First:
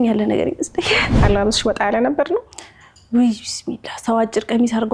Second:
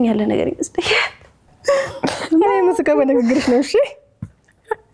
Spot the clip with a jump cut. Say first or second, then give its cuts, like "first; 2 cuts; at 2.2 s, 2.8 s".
first; 1 cut; at 1.1 s